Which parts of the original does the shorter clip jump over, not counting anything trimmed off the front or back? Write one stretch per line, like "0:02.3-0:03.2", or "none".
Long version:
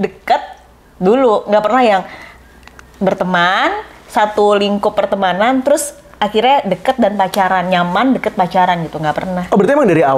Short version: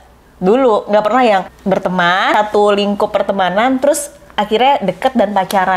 0:02.7-0:04.0